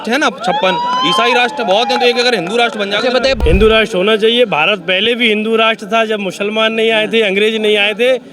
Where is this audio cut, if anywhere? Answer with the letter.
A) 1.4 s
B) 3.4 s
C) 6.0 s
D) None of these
B